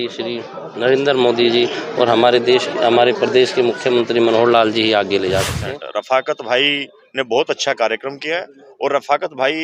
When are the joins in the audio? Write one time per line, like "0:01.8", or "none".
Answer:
0:05.5